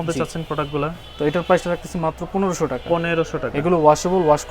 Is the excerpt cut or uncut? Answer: uncut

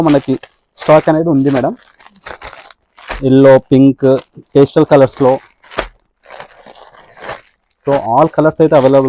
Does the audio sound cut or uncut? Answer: uncut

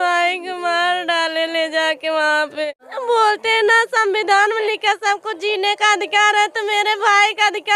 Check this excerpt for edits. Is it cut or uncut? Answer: cut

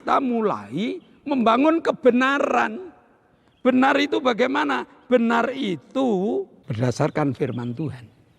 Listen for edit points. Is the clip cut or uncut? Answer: cut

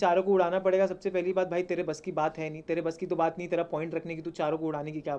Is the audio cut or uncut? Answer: uncut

